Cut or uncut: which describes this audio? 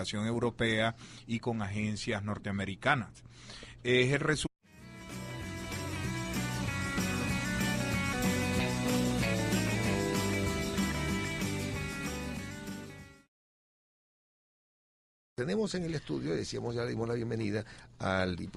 uncut